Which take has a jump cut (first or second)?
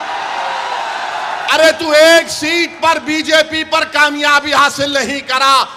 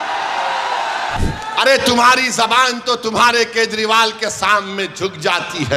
second